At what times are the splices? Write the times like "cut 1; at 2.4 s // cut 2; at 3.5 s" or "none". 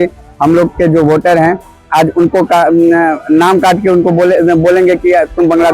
none